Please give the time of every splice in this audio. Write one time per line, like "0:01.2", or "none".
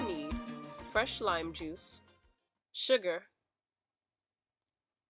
0:03.2